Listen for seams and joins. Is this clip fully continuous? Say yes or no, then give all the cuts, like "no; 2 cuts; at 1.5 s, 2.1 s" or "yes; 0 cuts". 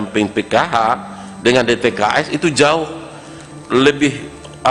yes; 0 cuts